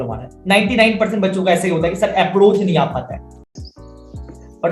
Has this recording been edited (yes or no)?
yes